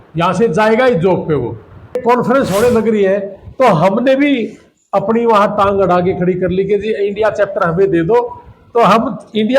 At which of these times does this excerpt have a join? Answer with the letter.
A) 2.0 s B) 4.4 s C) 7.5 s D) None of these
A